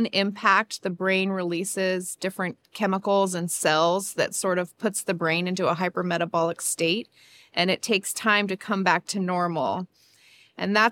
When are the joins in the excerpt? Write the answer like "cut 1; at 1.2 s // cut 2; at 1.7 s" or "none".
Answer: none